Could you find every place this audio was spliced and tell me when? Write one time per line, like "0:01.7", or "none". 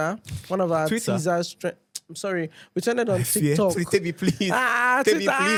none

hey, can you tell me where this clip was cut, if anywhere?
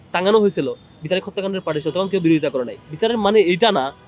0:02.8

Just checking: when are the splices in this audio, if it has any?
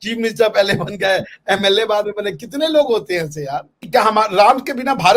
0:03.7

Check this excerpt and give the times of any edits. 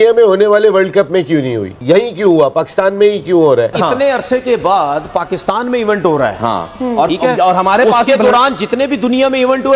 0:01.7
0:03.7

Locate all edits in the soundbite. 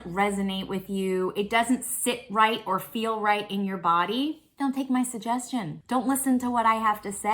0:04.5
0:05.8

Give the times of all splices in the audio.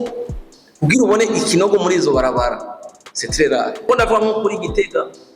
0:03.8

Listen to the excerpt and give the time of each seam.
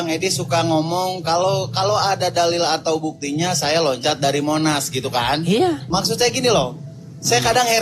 0:05.8

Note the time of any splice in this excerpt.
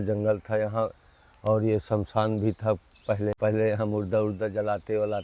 0:03.4

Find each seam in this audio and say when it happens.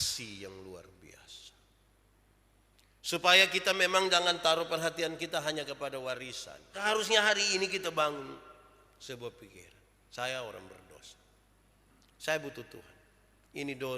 0:06.8

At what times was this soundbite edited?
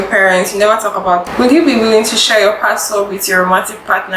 0:01.3

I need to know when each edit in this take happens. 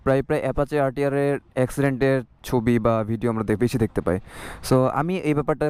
none

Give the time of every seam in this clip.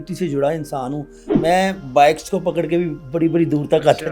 0:01.3

